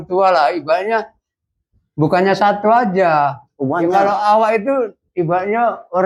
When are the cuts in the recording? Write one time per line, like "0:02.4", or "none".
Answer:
none